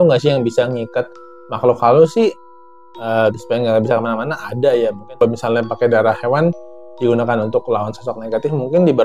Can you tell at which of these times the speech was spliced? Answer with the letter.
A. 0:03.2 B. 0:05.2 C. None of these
B